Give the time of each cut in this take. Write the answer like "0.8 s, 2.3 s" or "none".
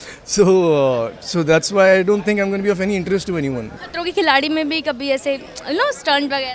3.8 s